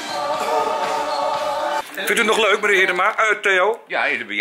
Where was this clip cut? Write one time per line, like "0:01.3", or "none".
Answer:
0:01.8